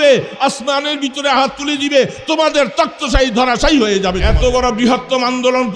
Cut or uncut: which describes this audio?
cut